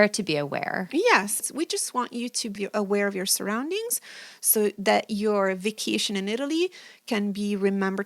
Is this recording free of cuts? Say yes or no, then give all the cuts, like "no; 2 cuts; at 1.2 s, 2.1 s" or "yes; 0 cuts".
no; 2 cuts; at 1.4 s, 2.6 s